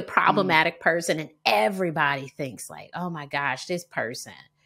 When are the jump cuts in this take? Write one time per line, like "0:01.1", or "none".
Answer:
none